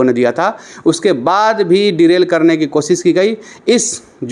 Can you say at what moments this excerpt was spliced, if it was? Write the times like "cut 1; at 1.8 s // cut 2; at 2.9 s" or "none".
none